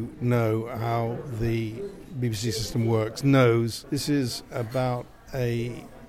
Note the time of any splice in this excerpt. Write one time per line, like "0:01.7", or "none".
0:03.8